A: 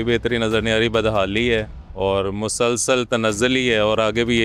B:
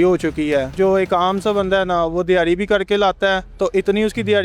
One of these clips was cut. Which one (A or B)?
B